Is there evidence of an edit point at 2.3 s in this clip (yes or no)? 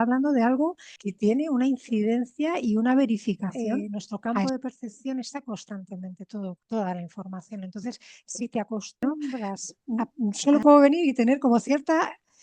no